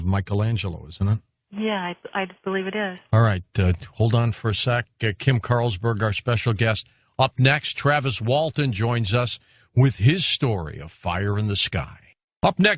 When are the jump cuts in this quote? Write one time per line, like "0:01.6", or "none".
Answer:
0:01.4